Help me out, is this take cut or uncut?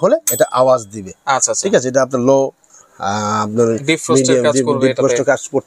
uncut